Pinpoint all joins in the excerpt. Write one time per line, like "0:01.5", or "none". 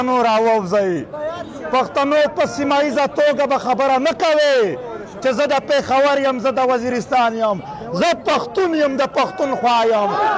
none